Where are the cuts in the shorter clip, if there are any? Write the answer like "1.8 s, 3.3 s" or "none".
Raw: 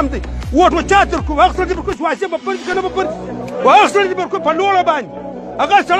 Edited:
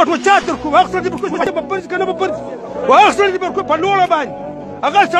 1.4 s